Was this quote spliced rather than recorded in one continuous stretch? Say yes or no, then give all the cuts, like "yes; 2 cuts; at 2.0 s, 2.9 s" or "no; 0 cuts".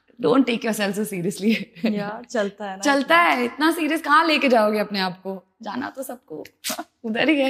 no; 0 cuts